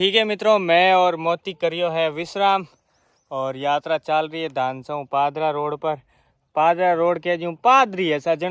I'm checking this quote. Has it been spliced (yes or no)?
no